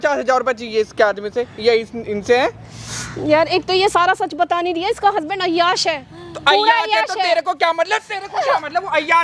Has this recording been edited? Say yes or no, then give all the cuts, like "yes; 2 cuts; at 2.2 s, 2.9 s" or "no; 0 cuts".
no; 0 cuts